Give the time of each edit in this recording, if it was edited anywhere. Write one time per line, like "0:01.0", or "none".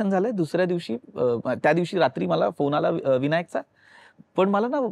none